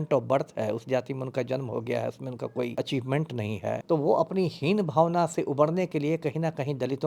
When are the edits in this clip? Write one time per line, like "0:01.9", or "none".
0:02.7
0:03.8